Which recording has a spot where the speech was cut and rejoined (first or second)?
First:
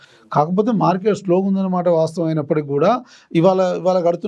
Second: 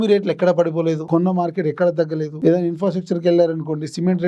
second